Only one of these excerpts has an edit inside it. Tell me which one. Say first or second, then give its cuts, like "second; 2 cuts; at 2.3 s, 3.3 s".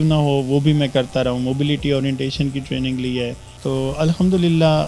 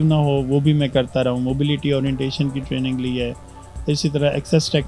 first; 1 cut; at 3.5 s